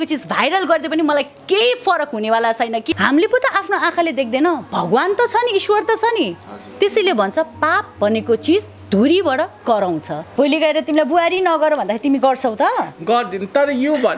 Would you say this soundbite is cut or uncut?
cut